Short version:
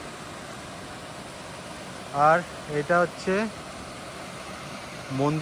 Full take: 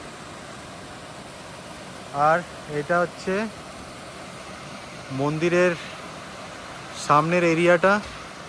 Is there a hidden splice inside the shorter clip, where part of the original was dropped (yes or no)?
no